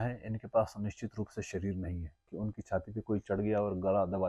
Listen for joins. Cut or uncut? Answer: cut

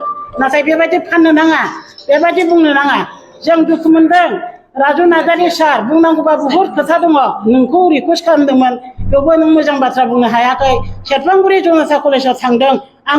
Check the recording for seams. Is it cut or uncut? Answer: cut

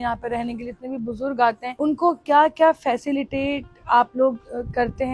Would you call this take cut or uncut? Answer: cut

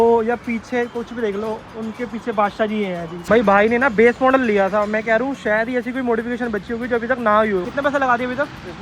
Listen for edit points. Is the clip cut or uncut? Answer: cut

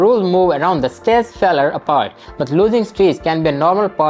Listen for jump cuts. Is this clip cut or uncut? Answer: cut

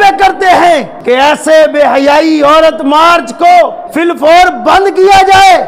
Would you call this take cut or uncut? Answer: cut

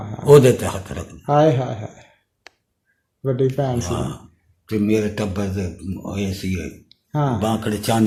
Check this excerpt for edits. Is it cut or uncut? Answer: uncut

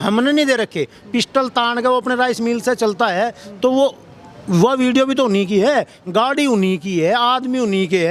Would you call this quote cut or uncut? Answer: uncut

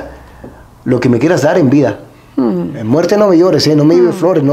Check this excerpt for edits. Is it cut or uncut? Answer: uncut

